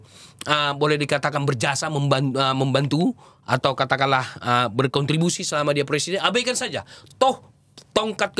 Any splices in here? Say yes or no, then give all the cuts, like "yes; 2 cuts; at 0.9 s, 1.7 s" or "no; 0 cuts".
no; 0 cuts